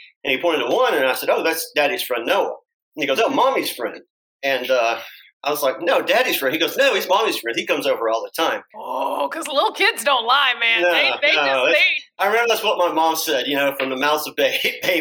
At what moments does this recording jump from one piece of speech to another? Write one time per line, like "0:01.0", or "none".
0:08.7